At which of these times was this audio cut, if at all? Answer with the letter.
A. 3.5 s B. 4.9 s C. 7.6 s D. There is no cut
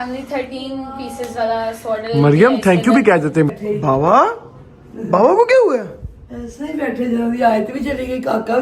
A